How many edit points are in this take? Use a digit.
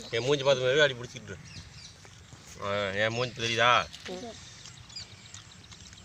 1